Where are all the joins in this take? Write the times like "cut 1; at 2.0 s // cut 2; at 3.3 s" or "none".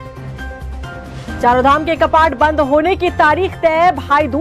cut 1; at 1.2 s